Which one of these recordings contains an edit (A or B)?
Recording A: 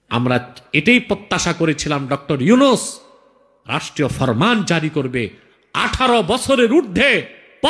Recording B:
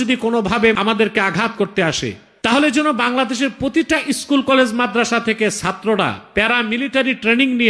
B